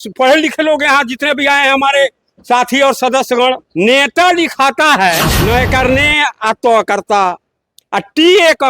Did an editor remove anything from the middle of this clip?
yes; 2 cuts; at 3.7 s, 5.3 s

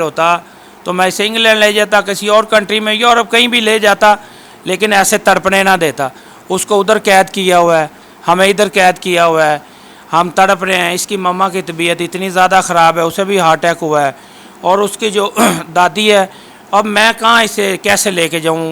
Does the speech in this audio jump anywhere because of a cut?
no; 0 cuts

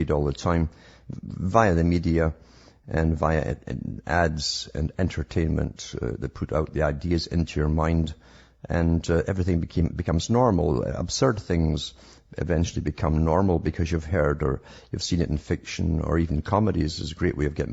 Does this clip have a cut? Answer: yes; 1 cut; at 16.1 s

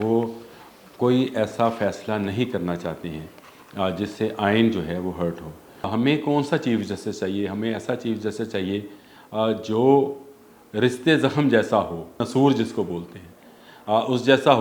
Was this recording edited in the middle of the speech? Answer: yes; 2 cuts; at 5.9 s, 12.2 s

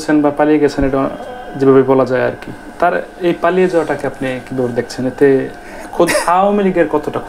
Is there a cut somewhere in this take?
no; 0 cuts

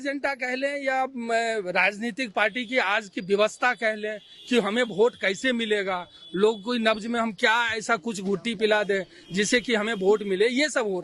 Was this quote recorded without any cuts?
yes; 0 cuts

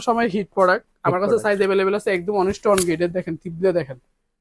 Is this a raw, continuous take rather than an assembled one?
yes; 0 cuts

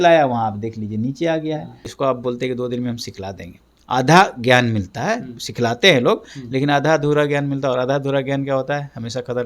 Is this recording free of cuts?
no; 1 cut; at 1.8 s

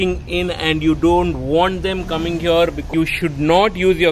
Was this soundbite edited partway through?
yes; 1 cut; at 2.9 s

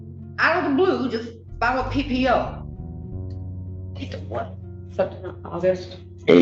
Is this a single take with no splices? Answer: no; 2 cuts; at 2.5 s, 3.9 s

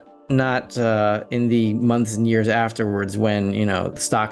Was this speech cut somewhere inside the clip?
no; 0 cuts

